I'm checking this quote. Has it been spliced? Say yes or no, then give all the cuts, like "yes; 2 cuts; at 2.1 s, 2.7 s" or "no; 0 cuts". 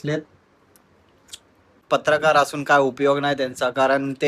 yes; 1 cut; at 1.8 s